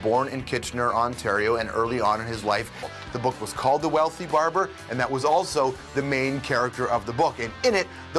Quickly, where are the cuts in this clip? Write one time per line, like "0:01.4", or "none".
none